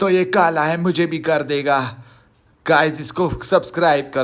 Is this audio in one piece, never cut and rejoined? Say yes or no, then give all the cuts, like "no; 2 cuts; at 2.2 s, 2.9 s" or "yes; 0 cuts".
yes; 0 cuts